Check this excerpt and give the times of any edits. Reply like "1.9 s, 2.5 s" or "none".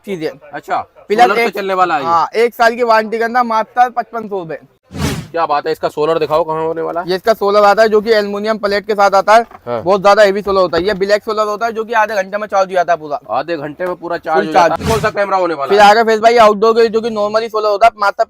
4.8 s, 14.8 s